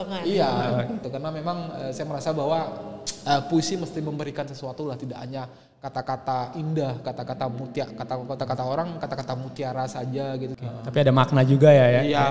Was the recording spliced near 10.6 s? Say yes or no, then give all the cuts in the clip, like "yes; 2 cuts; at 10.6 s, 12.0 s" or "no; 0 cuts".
yes; 2 cuts; at 1.0 s, 10.6 s